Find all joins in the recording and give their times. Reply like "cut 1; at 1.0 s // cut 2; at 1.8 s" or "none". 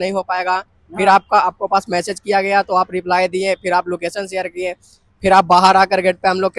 none